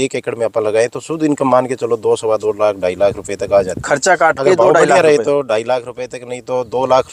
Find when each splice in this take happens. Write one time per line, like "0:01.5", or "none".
none

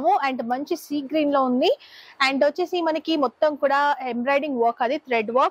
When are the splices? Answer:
none

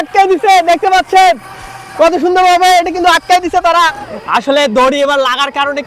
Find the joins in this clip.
0:04.0

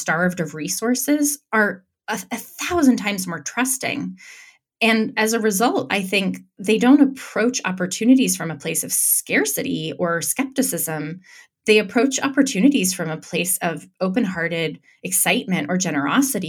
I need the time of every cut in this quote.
none

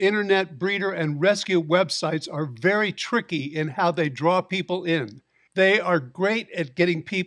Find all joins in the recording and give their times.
0:05.4

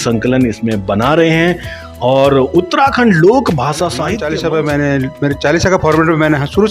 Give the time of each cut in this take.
0:04.1

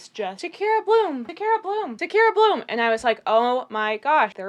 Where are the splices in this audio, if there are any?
none

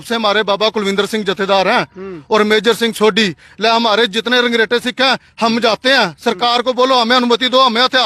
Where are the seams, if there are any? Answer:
none

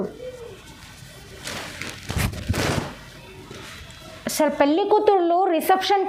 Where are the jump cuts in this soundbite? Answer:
none

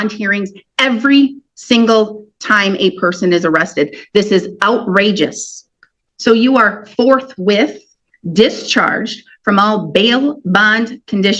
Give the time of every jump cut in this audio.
0:06.0

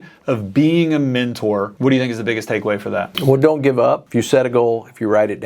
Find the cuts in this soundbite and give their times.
0:01.7
0:03.1
0:04.0

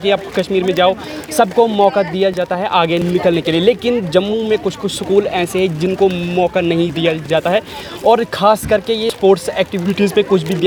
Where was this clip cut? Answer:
none

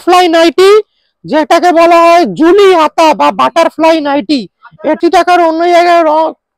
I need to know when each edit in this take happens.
0:05.0

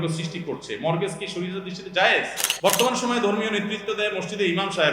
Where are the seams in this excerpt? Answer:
0:02.4

